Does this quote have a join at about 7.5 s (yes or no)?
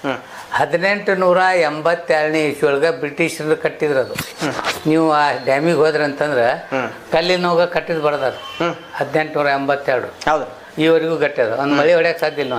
no